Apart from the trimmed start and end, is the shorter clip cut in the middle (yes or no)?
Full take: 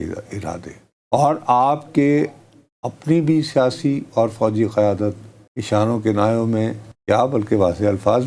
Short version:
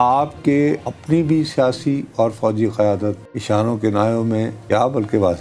yes